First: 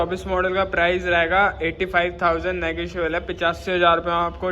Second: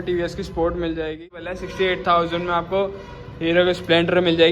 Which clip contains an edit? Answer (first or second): second